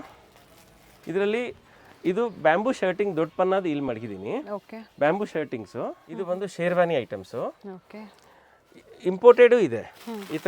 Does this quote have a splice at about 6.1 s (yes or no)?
yes